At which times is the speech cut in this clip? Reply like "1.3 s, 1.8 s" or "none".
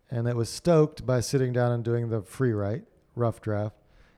2.9 s